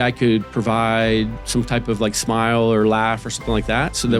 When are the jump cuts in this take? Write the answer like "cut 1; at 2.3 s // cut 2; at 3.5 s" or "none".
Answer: none